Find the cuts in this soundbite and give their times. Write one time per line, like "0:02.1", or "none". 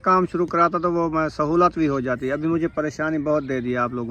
none